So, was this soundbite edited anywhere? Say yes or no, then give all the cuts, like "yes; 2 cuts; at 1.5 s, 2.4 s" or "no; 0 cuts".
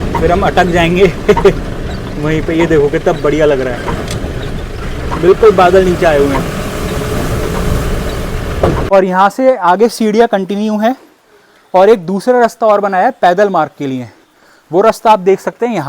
yes; 1 cut; at 8.8 s